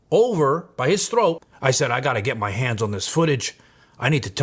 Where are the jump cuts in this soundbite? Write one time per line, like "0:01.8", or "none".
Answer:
0:01.5